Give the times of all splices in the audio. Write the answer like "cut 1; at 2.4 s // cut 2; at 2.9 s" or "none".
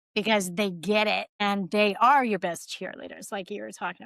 cut 1; at 1.3 s